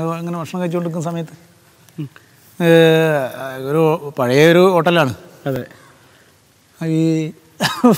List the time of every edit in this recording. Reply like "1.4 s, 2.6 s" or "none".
none